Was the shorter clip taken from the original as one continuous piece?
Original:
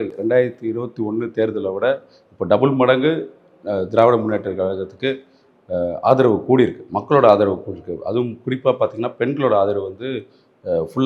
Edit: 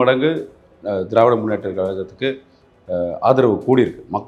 yes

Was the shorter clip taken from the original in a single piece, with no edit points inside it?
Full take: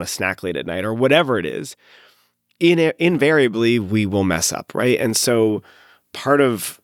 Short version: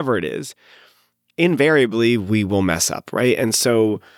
no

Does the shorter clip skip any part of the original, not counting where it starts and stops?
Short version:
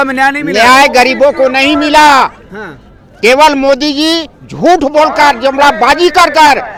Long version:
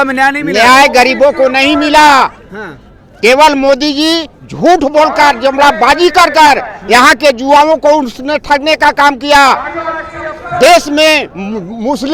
no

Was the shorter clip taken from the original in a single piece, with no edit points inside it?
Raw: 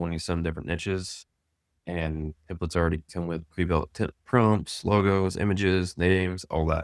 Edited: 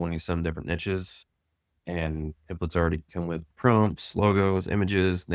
no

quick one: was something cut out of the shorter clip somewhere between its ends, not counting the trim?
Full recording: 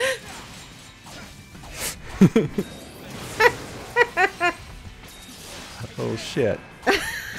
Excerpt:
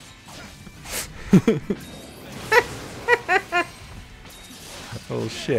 yes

